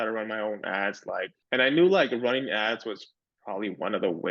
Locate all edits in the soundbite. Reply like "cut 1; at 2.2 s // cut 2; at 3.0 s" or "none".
cut 1; at 1.4 s